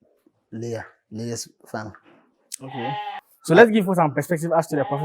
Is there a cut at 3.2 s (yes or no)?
yes